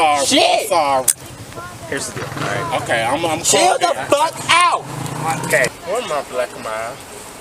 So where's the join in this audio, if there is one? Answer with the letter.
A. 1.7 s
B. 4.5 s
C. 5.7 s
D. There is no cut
C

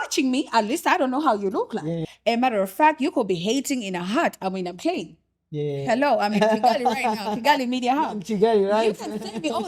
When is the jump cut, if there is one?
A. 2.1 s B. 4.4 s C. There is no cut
A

